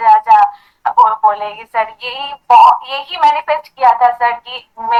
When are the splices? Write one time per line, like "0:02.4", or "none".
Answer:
none